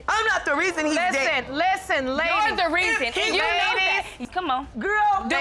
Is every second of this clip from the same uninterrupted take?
no; 1 cut; at 4.2 s

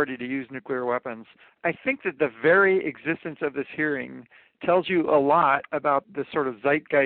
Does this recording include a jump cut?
yes; 2 cuts; at 1.6 s, 6.0 s

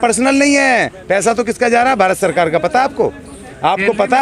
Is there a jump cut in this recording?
no; 0 cuts

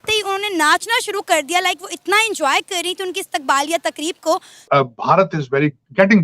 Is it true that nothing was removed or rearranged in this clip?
no; 1 cut; at 4.6 s

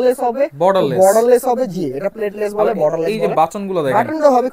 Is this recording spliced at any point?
no; 0 cuts

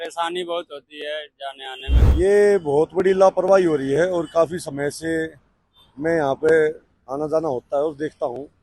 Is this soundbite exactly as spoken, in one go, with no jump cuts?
no; 1 cut; at 1.9 s

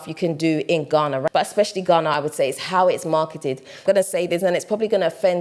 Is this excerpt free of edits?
no; 2 cuts; at 1.3 s, 3.8 s

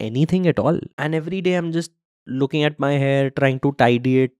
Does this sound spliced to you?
yes; 1 cut; at 0.9 s

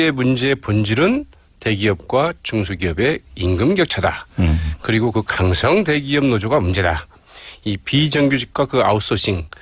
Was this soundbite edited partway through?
no; 0 cuts

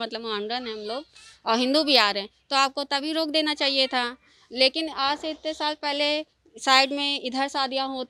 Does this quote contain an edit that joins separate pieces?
no; 0 cuts

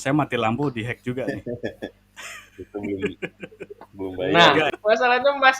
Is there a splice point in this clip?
yes; 1 cut; at 4.7 s

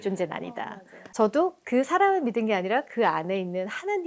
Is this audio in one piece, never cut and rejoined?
no; 1 cut; at 1.0 s

